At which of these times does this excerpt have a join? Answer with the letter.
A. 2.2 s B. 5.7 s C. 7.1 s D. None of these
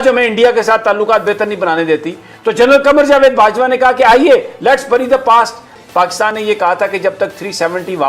B